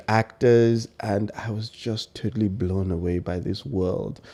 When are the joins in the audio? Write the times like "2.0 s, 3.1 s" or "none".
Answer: none